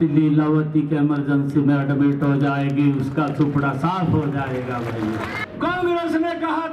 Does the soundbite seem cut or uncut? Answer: cut